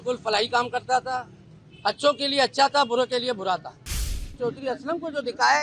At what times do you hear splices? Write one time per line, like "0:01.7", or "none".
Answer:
0:04.2